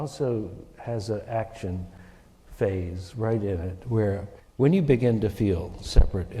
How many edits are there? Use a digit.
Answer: 1